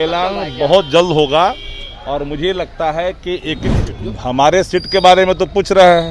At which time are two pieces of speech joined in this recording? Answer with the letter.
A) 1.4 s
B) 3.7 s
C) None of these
B